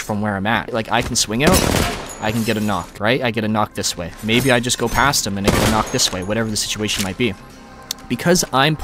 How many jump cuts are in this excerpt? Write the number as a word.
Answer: two